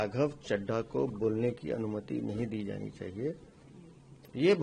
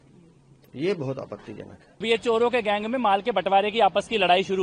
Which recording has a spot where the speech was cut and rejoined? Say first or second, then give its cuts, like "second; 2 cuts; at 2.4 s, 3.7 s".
second; 1 cut; at 2.0 s